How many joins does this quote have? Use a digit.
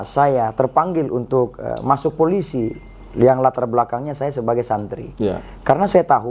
0